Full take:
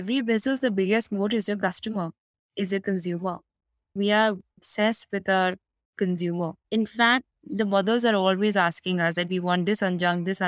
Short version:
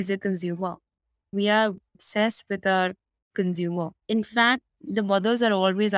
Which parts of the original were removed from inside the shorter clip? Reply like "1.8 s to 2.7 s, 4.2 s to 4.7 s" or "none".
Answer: none

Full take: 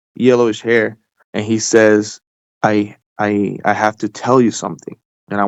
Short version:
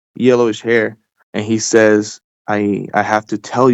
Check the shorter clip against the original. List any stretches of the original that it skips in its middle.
2.3 s to 3.0 s

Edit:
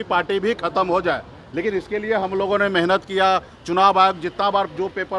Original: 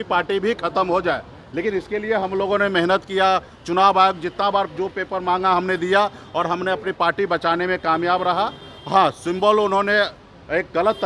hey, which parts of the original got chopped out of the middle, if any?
none

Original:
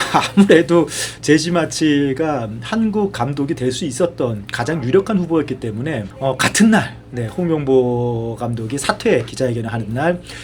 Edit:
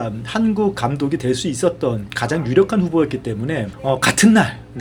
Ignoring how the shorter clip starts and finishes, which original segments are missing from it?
none

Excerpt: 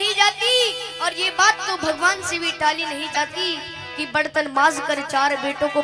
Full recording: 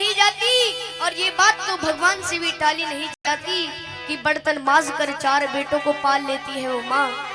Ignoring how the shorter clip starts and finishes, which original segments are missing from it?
3.1 s to 3.2 s

